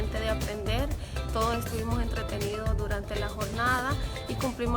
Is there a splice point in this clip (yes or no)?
no